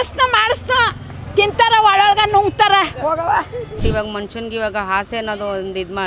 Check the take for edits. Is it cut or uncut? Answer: cut